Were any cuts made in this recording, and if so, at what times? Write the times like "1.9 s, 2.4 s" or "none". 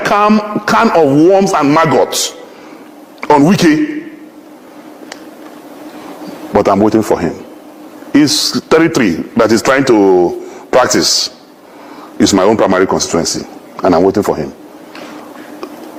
none